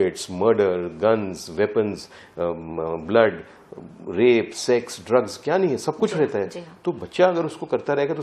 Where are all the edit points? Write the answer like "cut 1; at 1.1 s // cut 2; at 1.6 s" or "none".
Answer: none